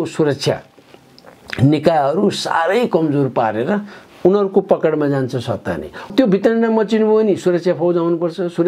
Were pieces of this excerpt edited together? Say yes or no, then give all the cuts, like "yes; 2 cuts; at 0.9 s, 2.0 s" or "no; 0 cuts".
yes; 1 cut; at 6.1 s